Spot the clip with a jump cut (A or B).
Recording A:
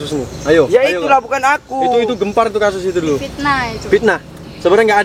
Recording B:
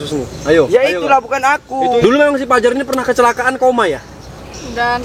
B